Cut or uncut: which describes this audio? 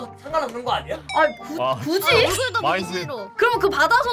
cut